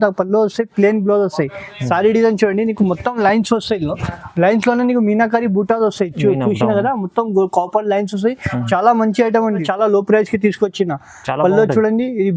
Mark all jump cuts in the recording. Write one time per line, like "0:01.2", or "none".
0:09.7